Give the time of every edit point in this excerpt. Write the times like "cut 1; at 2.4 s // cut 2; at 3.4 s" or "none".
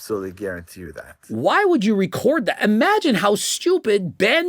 cut 1; at 1.2 s